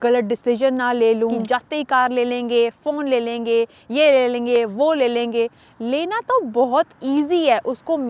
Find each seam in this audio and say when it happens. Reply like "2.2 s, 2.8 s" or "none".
1.4 s